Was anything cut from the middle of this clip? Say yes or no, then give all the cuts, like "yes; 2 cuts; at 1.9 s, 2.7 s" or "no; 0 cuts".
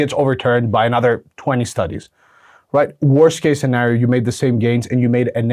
no; 0 cuts